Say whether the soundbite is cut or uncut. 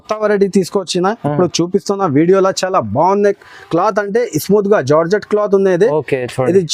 uncut